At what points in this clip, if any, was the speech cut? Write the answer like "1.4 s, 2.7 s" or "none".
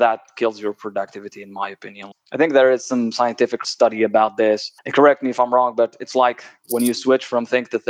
3.6 s